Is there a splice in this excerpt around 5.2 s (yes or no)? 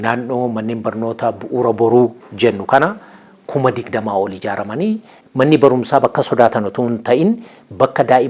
yes